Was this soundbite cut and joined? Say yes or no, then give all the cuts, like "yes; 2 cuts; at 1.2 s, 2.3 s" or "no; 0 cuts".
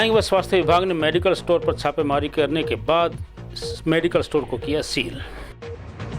yes; 1 cut; at 5.1 s